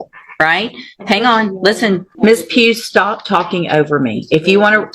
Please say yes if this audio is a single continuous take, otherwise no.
no